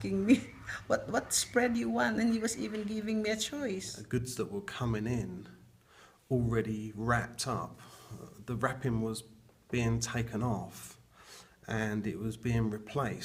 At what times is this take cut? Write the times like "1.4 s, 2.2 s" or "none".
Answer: 3.9 s